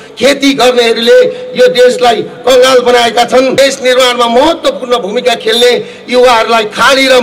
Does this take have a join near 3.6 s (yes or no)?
yes